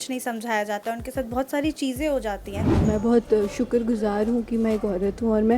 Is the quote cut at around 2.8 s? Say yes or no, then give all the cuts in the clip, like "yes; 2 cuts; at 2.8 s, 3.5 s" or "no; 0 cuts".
yes; 1 cut; at 2.8 s